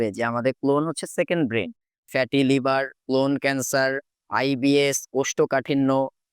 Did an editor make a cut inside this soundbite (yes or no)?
yes